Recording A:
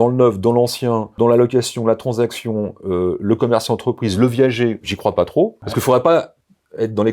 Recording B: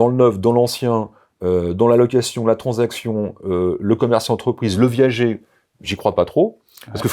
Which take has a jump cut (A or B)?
A